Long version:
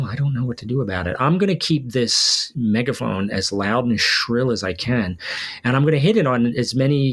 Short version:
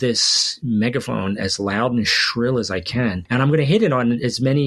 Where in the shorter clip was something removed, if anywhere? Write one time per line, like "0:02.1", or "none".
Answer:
0:03.2